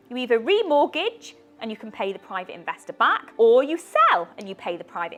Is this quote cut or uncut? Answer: uncut